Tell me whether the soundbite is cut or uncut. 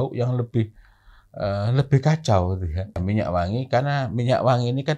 cut